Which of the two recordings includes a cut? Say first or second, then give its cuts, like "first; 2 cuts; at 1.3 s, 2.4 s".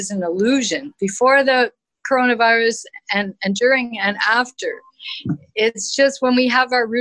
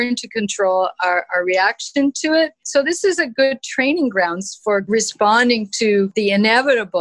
second; 3 cuts; at 2.6 s, 4.8 s, 6.1 s